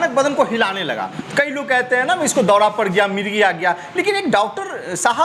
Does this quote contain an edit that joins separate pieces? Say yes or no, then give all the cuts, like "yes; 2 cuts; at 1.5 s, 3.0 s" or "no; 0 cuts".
no; 0 cuts